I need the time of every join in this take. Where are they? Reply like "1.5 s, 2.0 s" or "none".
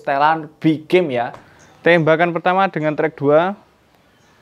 1.4 s